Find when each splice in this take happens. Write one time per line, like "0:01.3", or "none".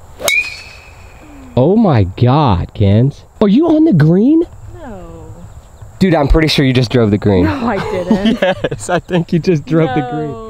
none